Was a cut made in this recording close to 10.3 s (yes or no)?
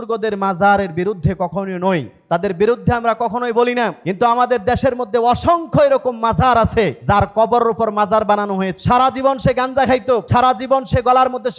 yes